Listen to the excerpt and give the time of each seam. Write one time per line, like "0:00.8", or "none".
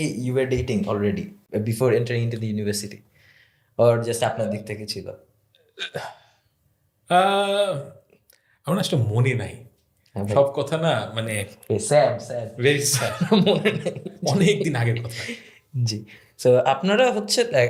none